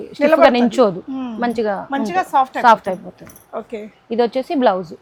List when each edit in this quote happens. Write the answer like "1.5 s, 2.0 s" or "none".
none